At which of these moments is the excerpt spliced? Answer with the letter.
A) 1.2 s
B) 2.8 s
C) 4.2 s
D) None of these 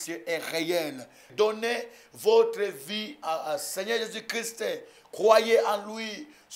A